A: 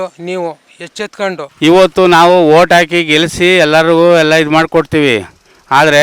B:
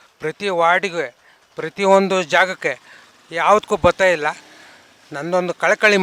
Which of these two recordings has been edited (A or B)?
A